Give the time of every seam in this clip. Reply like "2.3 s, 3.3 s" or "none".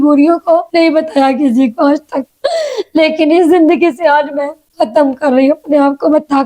none